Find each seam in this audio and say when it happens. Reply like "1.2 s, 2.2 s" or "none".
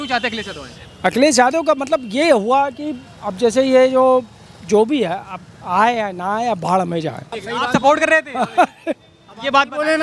7.3 s